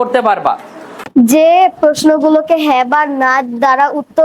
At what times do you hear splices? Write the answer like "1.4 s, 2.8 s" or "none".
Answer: 1.0 s